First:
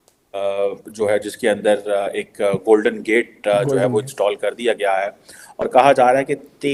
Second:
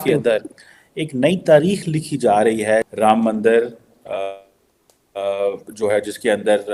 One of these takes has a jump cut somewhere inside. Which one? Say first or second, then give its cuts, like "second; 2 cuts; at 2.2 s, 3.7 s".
second; 1 cut; at 2.9 s